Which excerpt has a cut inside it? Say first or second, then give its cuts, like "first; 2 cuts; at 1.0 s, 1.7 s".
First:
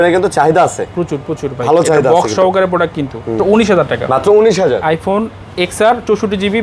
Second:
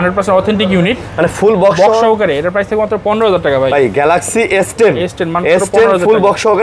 first; 1 cut; at 3.4 s